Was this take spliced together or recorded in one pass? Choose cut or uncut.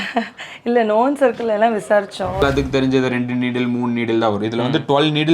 cut